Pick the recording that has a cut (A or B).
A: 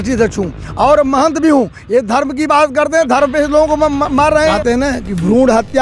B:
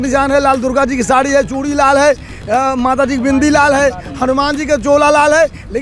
A